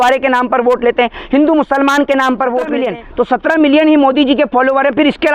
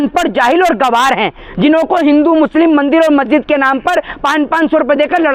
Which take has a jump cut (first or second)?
first